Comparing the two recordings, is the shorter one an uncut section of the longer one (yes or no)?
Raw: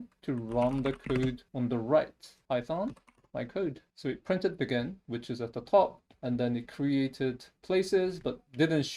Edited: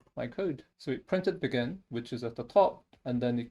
yes